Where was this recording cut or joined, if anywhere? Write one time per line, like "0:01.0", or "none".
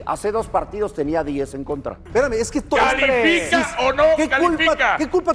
0:01.9